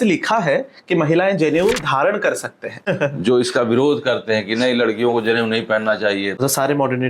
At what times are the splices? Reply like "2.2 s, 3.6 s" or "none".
2.8 s, 6.4 s